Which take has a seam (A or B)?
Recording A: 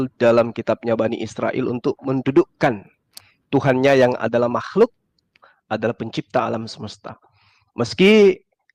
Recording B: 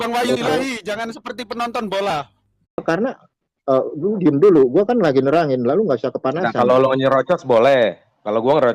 B